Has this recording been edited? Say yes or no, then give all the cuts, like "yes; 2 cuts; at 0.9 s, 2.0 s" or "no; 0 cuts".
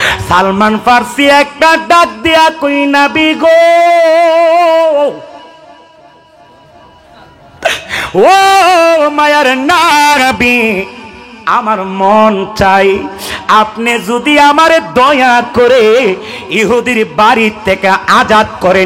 no; 0 cuts